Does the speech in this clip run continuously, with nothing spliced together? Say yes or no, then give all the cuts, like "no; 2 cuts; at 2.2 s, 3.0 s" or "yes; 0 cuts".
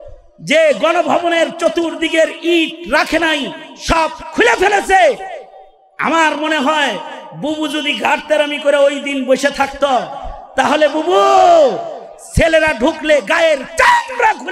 yes; 0 cuts